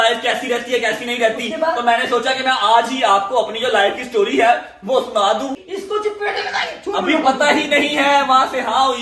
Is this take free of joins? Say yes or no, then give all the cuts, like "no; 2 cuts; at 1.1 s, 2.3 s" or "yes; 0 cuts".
no; 1 cut; at 5.6 s